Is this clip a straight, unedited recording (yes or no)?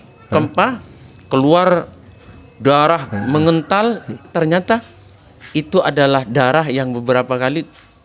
yes